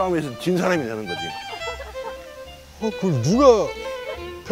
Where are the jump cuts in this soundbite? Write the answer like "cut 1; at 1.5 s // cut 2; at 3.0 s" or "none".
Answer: none